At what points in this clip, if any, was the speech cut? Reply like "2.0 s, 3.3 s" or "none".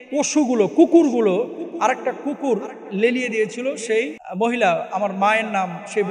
4.2 s